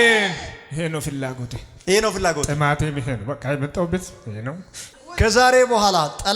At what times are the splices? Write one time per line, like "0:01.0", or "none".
0:04.8